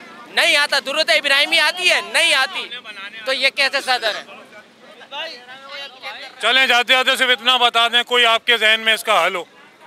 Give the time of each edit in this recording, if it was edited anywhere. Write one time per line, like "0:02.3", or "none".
none